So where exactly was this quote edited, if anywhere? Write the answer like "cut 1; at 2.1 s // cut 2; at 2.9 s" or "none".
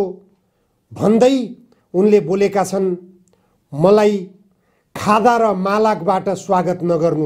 none